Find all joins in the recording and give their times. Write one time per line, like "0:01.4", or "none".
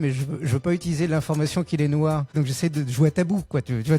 0:02.4